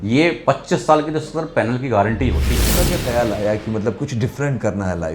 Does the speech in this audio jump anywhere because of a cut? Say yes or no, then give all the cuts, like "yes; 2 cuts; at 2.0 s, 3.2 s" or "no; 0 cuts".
yes; 1 cut; at 2.7 s